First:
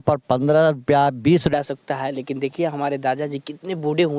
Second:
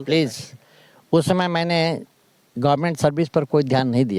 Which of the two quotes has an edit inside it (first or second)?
first